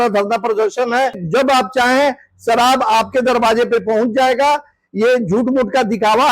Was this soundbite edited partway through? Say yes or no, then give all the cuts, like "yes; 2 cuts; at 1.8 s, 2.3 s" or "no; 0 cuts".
yes; 1 cut; at 1.2 s